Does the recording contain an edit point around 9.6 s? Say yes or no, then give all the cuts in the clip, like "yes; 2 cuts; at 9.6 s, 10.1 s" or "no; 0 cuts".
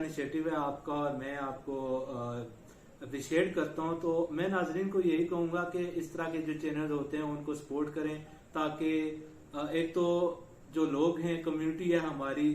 no; 0 cuts